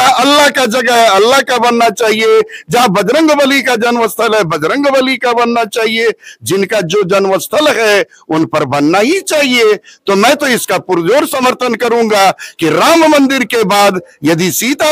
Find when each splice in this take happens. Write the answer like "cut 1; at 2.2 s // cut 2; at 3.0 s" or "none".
none